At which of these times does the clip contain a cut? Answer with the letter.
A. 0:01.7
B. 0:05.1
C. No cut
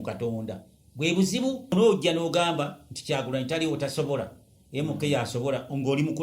A